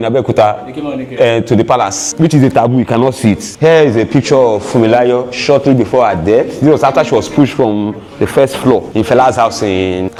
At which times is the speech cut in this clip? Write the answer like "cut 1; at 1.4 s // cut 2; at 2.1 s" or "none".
none

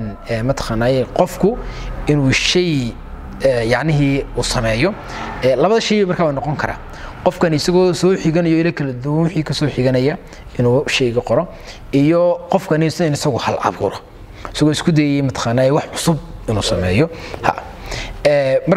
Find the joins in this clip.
none

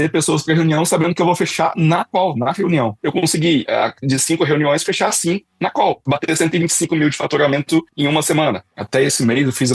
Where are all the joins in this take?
cut 1; at 3.0 s // cut 2; at 8.6 s

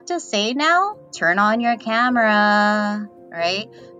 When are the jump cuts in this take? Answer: cut 1; at 1.1 s

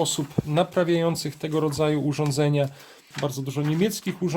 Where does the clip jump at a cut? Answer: cut 1; at 3.1 s

